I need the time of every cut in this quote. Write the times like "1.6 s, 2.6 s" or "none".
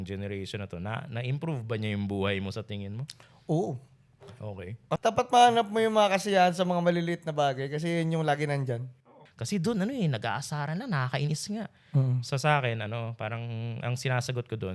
5.0 s, 8.9 s